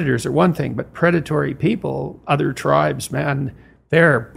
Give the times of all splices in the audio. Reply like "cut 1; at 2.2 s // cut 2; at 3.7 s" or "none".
none